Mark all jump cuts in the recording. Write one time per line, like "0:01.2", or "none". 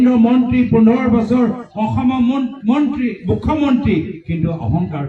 none